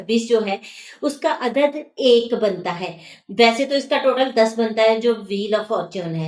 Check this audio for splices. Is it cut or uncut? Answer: uncut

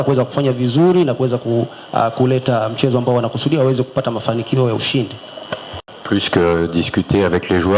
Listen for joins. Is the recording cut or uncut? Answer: cut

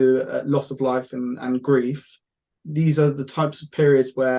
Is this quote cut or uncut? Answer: uncut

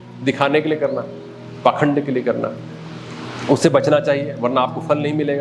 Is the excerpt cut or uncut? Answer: uncut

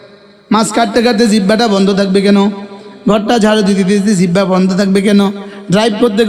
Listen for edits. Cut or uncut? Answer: uncut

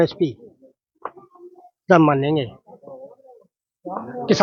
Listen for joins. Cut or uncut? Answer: uncut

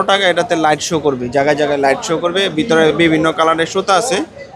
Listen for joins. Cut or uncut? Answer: uncut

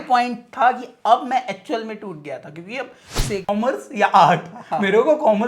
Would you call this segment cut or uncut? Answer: cut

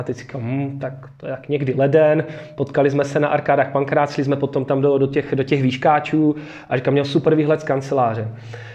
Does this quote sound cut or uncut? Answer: uncut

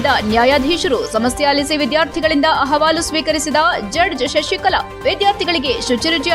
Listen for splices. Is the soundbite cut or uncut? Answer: uncut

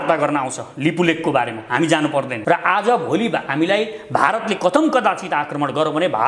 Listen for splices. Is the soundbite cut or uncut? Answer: cut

